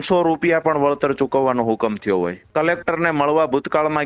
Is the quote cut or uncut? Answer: cut